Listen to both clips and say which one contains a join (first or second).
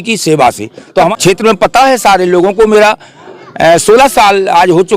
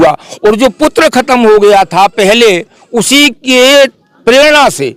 first